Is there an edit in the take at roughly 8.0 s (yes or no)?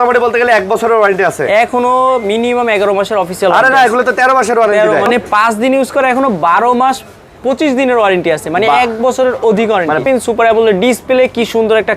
no